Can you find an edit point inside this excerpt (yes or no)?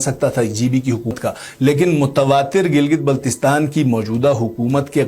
yes